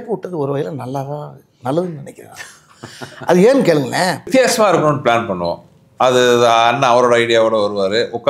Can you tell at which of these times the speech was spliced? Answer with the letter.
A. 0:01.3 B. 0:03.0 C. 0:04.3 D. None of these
C